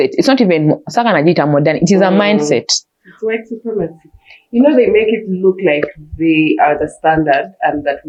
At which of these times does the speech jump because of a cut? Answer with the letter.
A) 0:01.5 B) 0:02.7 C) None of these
C